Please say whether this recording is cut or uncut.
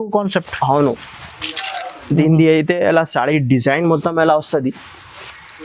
uncut